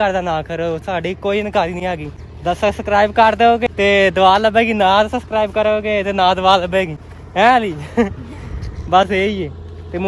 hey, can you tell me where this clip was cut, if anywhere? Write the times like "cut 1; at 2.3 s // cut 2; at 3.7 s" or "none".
cut 1; at 1.8 s // cut 2; at 3.6 s